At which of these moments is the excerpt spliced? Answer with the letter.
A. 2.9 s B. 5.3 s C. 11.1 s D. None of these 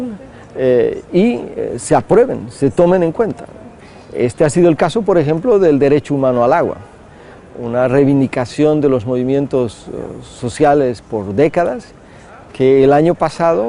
C